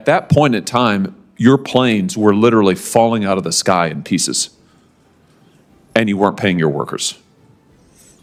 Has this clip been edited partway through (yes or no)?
no